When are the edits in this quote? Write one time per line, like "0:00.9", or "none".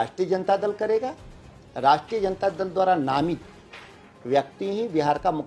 none